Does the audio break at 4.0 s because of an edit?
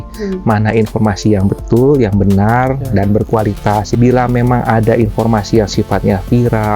yes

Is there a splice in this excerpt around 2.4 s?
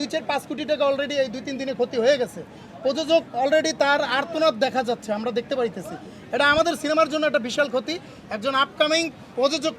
no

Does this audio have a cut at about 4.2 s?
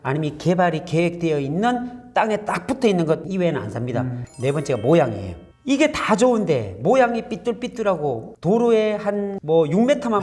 yes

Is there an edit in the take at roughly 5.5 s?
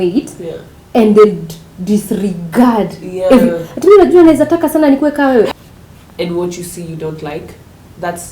yes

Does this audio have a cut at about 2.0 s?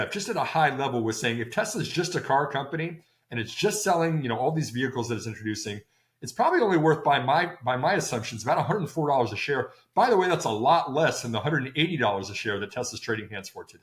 no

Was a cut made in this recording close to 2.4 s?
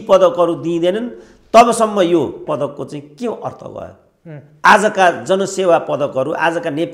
yes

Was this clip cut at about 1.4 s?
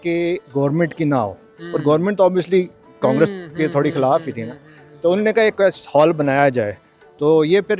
no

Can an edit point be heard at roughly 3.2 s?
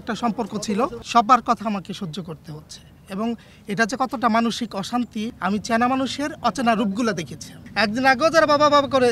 no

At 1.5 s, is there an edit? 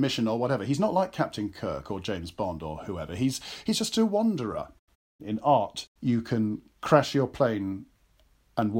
no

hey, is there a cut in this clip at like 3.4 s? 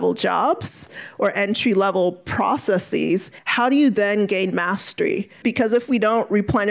yes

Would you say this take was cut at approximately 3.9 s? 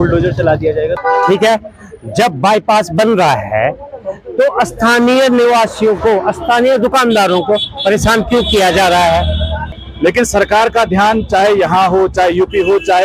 no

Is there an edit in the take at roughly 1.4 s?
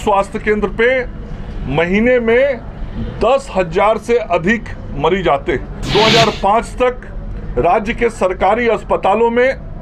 no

